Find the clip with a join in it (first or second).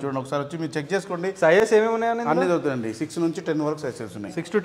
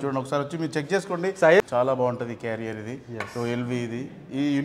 second